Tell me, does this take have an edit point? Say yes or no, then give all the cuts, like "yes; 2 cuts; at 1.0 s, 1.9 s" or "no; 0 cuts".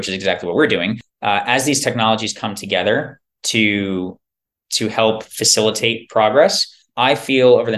no; 0 cuts